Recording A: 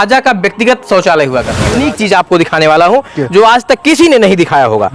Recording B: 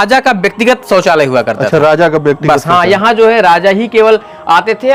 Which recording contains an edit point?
A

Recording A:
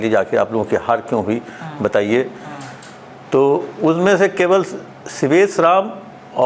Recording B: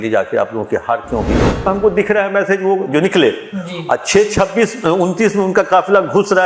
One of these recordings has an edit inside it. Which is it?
B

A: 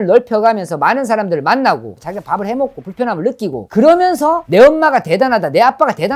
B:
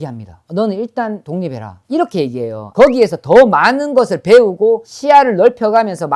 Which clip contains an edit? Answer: A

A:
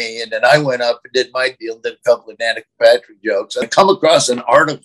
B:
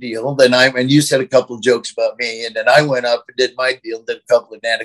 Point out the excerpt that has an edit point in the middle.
A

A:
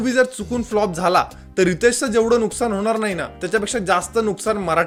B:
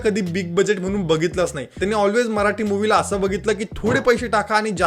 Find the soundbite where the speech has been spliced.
B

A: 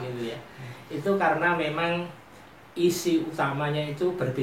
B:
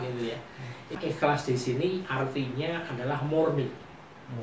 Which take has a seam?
B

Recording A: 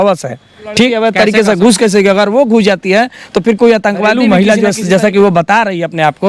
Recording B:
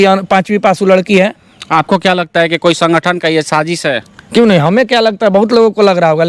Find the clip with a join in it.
A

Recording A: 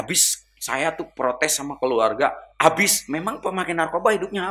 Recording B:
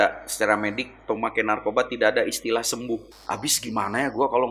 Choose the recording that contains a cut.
B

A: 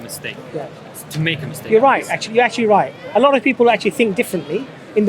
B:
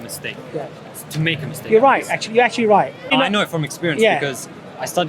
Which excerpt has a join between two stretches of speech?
B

